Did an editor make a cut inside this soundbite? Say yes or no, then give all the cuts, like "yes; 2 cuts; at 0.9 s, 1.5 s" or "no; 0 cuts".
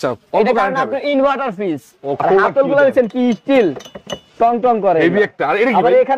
yes; 1 cut; at 2.2 s